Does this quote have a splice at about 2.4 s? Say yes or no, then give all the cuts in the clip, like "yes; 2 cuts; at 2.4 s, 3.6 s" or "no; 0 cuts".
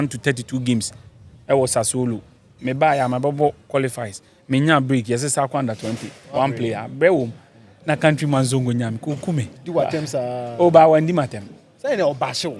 no; 1 cut; at 9.6 s